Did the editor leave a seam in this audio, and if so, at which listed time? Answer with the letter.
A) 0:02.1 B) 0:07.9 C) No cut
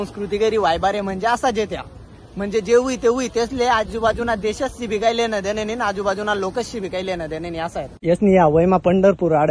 B